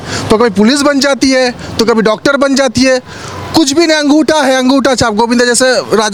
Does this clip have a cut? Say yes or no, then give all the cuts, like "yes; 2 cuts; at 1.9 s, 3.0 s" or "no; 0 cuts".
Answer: no; 0 cuts